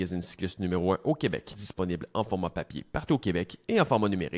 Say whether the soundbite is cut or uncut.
cut